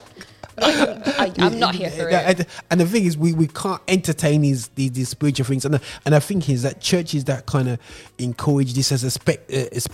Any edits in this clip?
no; 0 cuts

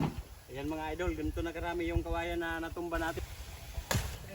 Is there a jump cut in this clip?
yes; 1 cut; at 3.4 s

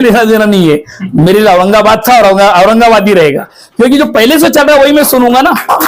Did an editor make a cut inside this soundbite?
no; 0 cuts

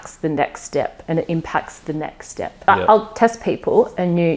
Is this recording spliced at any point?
yes; 1 cut; at 2.6 s

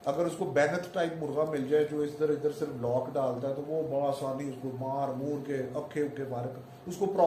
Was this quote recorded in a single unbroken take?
yes; 0 cuts

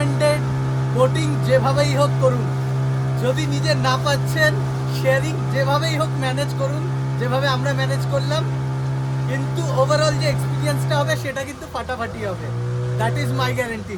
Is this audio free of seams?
yes; 0 cuts

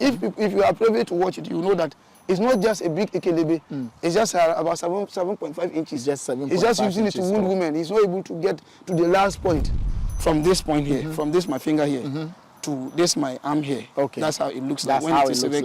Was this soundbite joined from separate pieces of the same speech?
yes; 1 cut; at 9.8 s

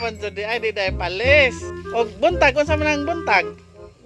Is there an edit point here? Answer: yes; 1 cut; at 1.9 s

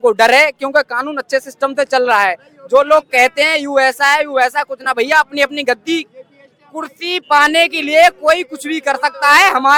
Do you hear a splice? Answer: no; 0 cuts

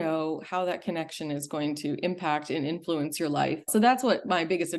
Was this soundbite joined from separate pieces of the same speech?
yes; 1 cut; at 3.7 s

